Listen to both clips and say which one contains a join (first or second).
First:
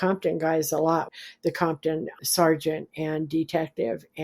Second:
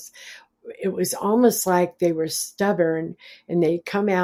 first